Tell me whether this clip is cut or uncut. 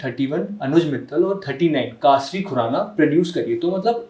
uncut